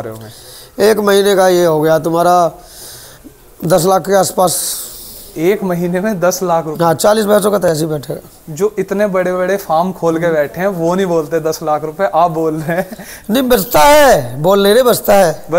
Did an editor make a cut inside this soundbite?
no; 0 cuts

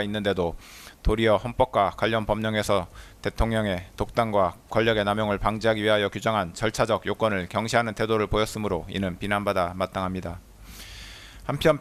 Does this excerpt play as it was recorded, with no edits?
yes; 0 cuts

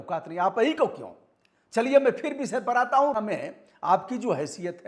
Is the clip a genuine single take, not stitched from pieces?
no; 1 cut; at 3.1 s

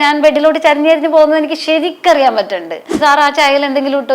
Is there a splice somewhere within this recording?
yes; 1 cut; at 3.0 s

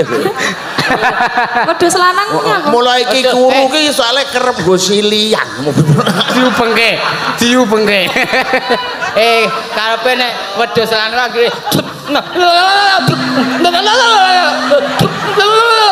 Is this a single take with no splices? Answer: yes; 0 cuts

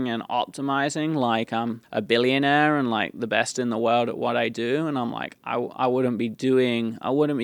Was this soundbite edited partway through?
yes; 1 cut; at 1.8 s

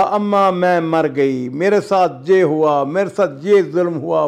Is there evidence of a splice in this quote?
no; 0 cuts

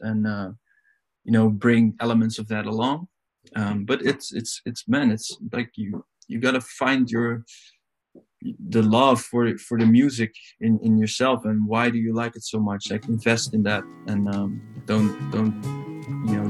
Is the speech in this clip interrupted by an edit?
no; 0 cuts

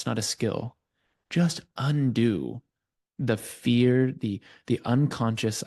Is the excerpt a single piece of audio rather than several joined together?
yes; 0 cuts

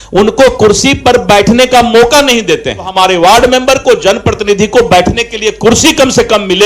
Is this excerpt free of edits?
no; 1 cut; at 2.9 s

